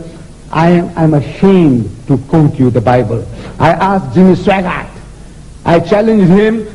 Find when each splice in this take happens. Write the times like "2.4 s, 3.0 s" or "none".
none